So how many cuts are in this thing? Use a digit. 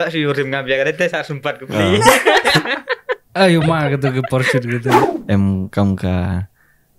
1